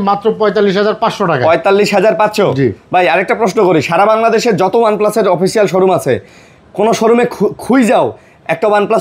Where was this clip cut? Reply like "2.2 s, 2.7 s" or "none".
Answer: none